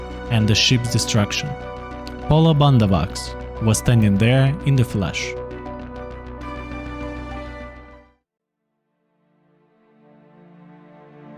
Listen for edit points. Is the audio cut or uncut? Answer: cut